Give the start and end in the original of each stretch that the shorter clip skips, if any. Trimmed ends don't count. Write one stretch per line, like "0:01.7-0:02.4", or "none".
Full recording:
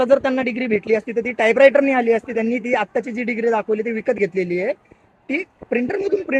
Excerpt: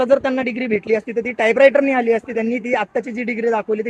none